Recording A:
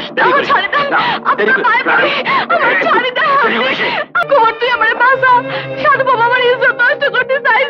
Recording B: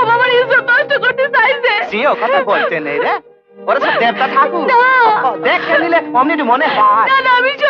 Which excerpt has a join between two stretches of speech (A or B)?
A